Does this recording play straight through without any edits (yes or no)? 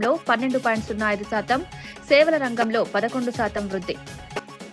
yes